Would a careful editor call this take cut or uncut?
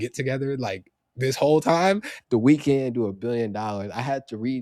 cut